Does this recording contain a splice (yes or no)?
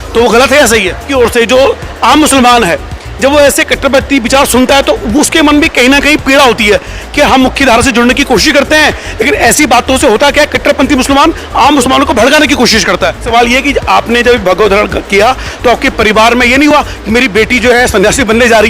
yes